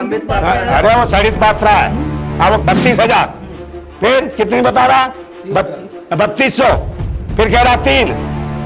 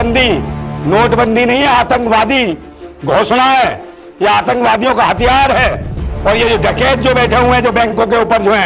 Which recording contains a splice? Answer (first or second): first